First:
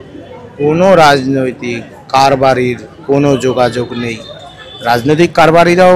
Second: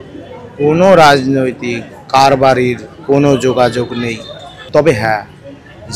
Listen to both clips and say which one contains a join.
second; 1 cut; at 4.6 s

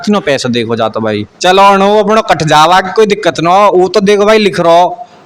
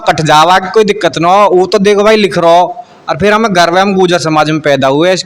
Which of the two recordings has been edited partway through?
first; 1 cut; at 1.3 s

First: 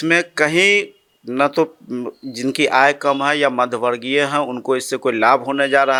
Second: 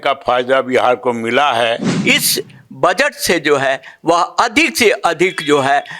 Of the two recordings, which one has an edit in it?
second; 1 cut; at 1.9 s

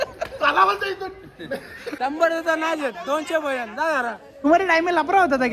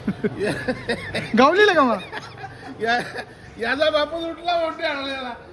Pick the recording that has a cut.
first; 2 cuts; at 1.8 s, 4.5 s

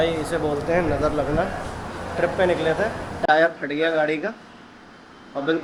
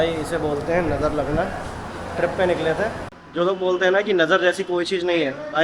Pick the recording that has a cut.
second; 1 cut; at 3.1 s

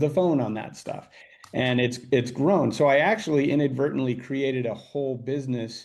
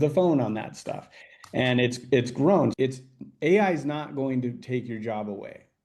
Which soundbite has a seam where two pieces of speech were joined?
second; 1 cut; at 2.7 s

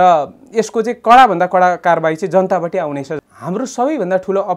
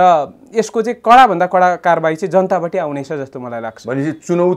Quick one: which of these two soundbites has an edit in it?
first; 1 cut; at 3.2 s

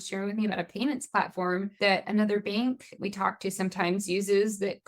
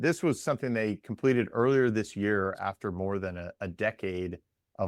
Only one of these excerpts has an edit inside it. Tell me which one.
first; 2 cuts; at 2.0 s, 2.9 s

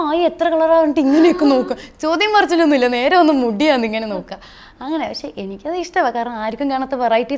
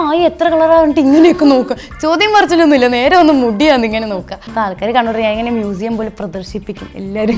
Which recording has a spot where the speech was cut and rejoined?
second; 1 cut; at 4.4 s

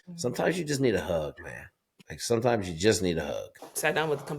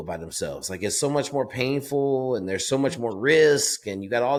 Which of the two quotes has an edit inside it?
first; 1 cut; at 3.5 s

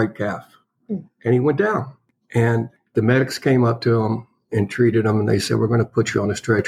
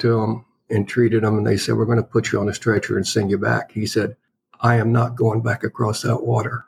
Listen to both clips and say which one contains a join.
first; 1 cut; at 2.9 s

